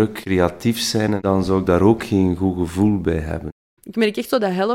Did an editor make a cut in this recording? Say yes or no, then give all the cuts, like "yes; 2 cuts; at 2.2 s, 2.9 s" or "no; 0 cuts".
yes; 2 cuts; at 1.2 s, 3.4 s